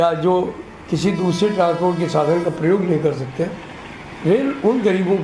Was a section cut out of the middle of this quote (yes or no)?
no